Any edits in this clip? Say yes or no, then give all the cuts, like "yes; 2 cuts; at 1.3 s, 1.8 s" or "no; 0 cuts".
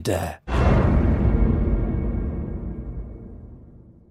no; 0 cuts